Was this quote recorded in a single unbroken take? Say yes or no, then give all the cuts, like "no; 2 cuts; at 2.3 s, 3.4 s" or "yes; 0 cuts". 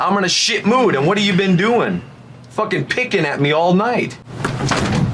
no; 1 cut; at 4.2 s